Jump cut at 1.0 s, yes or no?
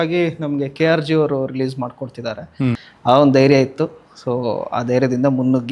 no